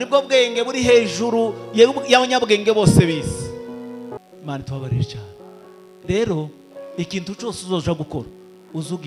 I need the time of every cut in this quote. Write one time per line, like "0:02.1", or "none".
0:04.2